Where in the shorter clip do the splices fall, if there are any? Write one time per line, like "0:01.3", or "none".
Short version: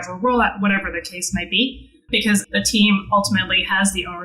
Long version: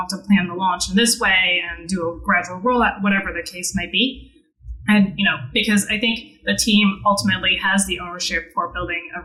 0:02.3